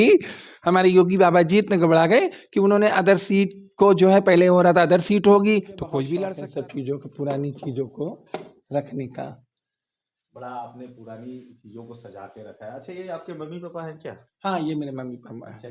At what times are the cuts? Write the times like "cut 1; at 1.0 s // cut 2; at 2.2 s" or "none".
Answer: cut 1; at 6.2 s